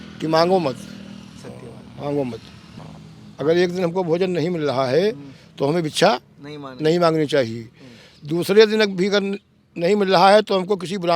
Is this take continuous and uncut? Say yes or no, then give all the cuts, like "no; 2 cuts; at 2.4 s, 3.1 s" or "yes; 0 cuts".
no; 1 cut; at 2.7 s